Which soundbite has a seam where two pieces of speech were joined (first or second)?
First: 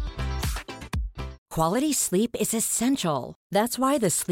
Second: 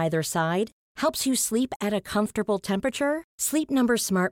first